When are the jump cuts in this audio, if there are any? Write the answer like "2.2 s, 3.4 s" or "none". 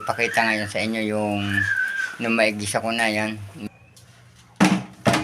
3.7 s

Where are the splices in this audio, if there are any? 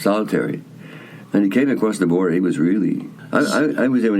3.2 s

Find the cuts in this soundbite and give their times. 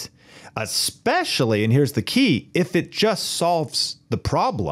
none

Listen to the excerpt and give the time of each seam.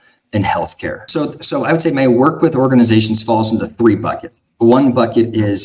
1.0 s

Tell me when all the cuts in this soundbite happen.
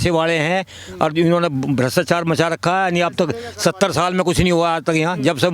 none

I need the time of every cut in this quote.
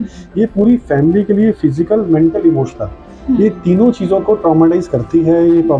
none

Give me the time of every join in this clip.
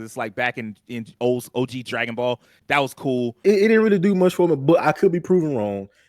3.4 s

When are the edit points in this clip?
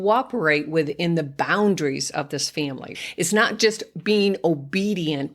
3.0 s

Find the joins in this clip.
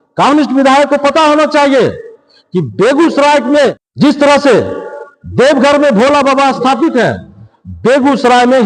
3.8 s

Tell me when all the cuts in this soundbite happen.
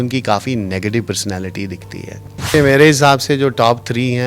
2.5 s

